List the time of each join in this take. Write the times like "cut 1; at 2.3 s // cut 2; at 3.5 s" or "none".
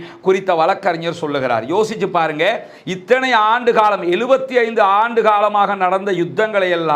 none